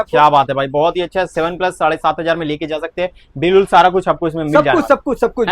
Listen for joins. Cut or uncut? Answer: uncut